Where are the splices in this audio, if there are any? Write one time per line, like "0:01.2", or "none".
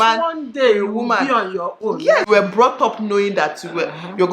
0:02.3